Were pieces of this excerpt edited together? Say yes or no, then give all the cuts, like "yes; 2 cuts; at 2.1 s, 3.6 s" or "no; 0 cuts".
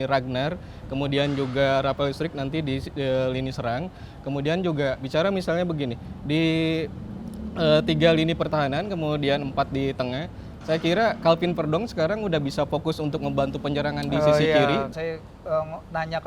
yes; 1 cut; at 14.9 s